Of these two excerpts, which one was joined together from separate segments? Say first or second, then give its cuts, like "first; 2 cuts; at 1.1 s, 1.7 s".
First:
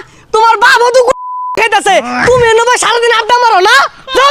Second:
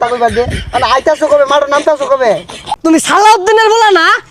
second; 1 cut; at 2.6 s